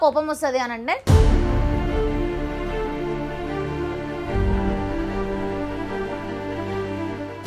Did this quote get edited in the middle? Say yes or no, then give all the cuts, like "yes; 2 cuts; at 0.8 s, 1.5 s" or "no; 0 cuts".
no; 0 cuts